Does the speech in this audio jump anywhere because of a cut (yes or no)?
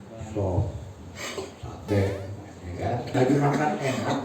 yes